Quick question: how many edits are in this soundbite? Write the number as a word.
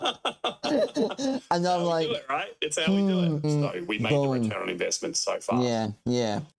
zero